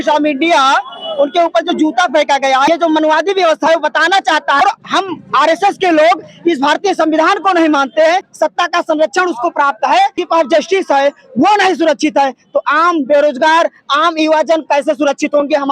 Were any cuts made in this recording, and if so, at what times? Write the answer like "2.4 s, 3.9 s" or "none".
2.7 s, 4.6 s, 8.3 s, 10.2 s